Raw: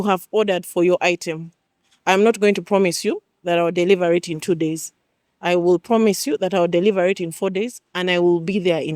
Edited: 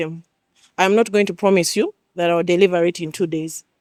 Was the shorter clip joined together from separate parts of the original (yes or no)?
no